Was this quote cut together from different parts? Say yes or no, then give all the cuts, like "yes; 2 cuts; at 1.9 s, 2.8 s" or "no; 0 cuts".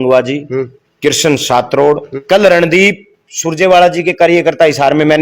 yes; 1 cut; at 2.1 s